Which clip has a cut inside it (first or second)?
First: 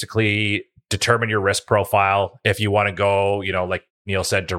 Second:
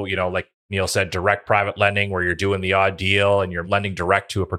second